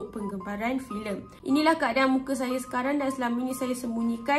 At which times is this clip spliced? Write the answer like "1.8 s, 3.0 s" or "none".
1.3 s